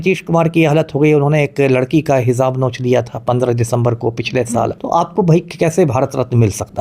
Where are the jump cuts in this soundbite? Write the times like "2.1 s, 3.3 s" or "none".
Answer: 4.8 s